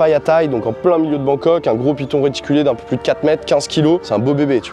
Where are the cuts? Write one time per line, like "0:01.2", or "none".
none